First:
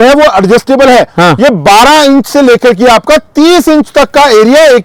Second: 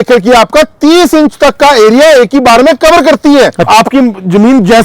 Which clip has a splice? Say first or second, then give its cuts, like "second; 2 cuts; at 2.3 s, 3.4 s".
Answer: second; 1 cut; at 3.7 s